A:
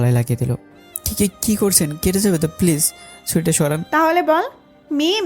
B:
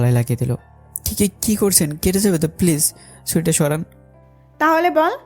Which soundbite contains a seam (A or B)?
A